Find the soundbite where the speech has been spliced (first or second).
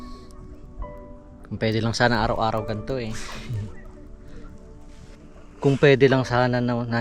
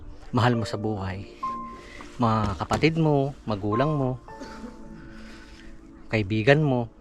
first